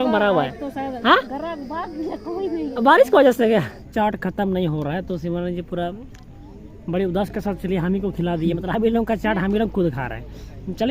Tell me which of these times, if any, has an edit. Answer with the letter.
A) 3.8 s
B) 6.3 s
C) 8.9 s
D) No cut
A